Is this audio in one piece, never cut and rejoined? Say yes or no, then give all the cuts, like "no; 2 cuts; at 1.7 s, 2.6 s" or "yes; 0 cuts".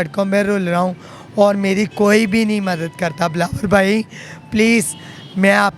yes; 0 cuts